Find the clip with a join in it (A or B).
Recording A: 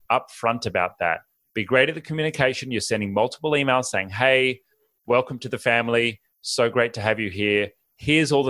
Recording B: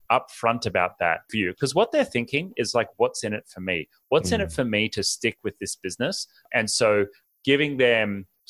B